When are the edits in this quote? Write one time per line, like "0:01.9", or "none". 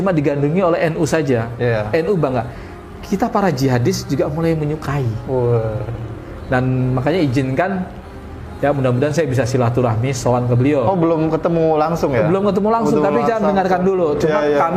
none